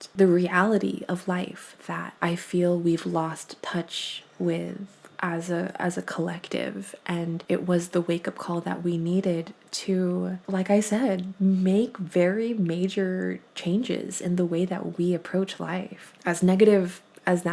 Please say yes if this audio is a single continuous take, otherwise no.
yes